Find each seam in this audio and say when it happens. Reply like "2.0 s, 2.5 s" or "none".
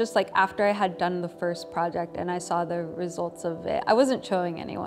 none